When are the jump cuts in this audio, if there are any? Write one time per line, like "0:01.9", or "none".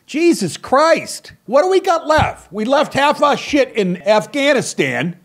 0:01.4
0:04.0